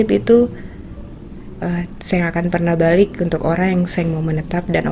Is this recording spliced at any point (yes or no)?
no